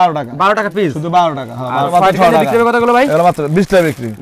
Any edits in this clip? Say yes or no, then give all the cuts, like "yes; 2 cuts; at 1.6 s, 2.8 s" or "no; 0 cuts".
yes; 1 cut; at 1.9 s